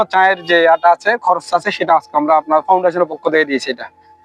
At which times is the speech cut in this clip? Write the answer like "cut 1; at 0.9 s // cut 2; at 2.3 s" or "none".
none